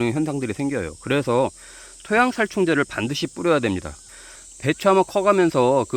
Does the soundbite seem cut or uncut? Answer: cut